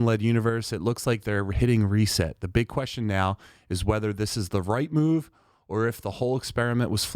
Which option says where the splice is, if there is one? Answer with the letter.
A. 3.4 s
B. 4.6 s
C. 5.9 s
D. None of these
D